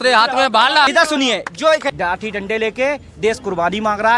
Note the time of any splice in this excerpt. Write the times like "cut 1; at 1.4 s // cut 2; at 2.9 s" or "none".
cut 1; at 1.9 s